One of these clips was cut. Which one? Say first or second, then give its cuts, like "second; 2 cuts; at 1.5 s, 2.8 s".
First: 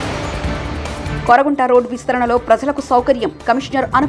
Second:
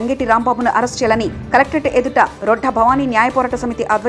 first; 1 cut; at 1.0 s